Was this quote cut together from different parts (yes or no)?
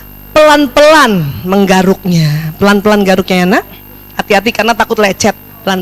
no